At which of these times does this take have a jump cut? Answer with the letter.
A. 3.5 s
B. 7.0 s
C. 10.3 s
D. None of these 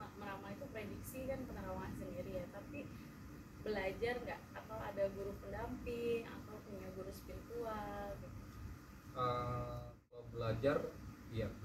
C